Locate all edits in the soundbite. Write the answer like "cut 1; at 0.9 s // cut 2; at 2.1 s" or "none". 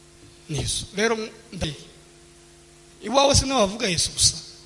cut 1; at 1.6 s